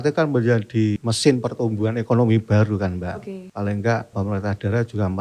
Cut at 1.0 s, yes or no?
yes